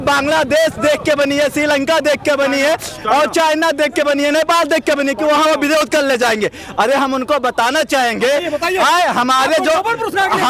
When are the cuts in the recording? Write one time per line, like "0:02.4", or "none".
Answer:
none